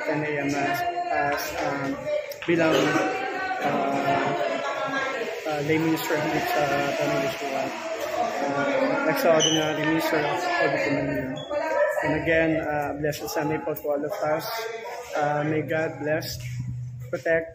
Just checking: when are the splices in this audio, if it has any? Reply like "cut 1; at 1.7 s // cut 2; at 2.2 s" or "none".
none